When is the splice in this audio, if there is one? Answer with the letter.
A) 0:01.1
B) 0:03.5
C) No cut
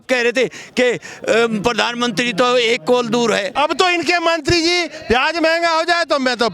B